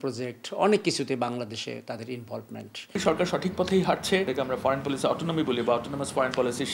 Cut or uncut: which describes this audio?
cut